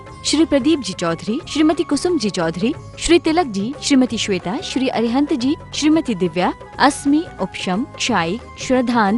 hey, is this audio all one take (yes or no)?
yes